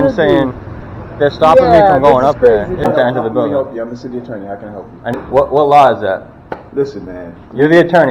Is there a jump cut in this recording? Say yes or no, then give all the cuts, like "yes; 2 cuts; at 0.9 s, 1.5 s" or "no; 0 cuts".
yes; 2 cuts; at 2.8 s, 5.2 s